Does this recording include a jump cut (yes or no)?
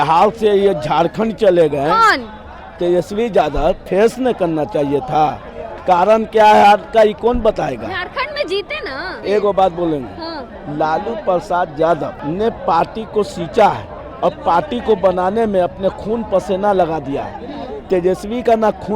yes